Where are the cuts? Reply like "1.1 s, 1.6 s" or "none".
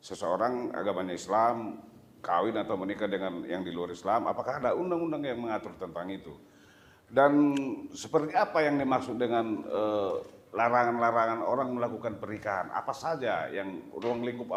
none